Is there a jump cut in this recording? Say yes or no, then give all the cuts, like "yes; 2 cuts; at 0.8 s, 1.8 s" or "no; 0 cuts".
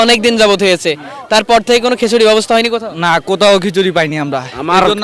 no; 0 cuts